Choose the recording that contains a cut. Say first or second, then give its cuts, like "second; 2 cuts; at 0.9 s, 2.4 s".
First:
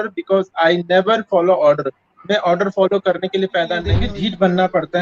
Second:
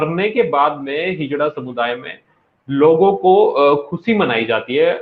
first; 1 cut; at 4.0 s